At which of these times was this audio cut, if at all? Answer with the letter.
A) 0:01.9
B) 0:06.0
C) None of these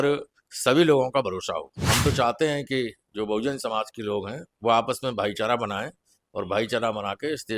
A